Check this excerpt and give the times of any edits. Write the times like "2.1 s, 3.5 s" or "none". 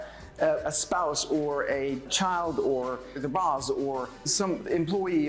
2.1 s, 3.2 s, 4.4 s